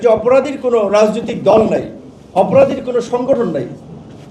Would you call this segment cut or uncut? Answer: uncut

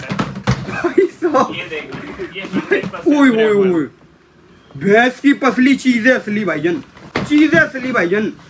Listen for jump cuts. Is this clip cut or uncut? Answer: uncut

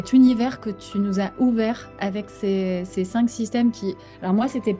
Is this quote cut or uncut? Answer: uncut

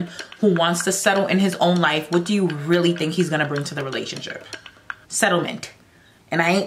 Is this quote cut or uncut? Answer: uncut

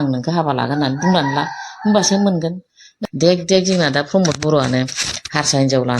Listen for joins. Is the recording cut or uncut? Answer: cut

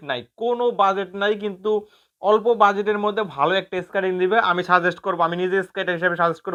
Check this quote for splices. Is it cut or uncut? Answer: uncut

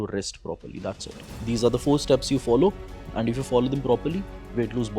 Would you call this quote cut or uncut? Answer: uncut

